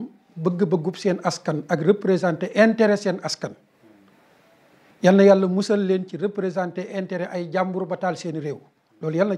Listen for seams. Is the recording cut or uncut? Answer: uncut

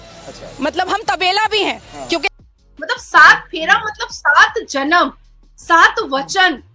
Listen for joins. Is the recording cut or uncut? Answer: cut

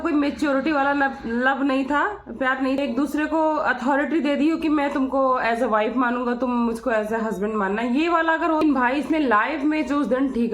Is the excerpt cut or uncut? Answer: cut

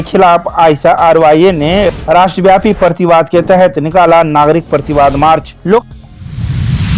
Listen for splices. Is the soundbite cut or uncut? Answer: cut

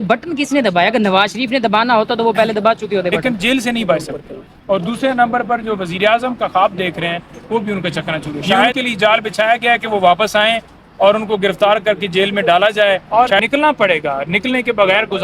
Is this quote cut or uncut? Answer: cut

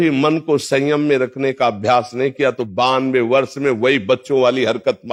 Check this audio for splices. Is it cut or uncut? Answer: uncut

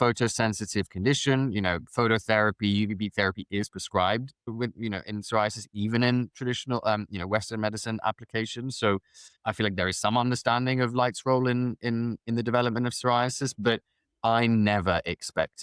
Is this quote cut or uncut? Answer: uncut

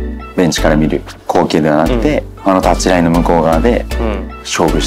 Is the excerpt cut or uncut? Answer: uncut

